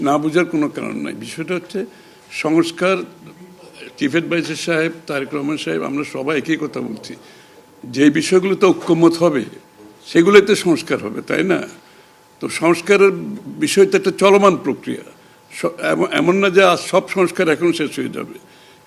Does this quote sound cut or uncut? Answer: uncut